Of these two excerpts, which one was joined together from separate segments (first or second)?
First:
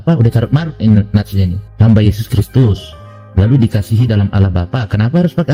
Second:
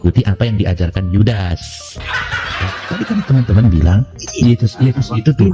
second